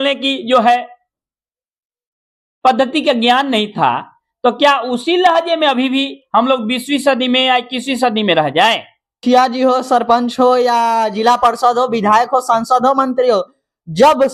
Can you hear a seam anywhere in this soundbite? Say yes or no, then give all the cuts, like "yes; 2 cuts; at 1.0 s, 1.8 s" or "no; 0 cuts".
yes; 1 cut; at 9.2 s